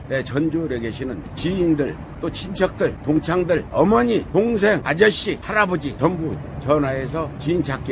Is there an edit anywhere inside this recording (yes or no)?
no